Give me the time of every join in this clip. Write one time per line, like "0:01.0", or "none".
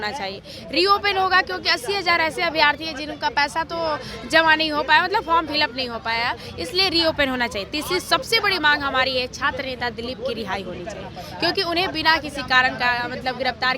none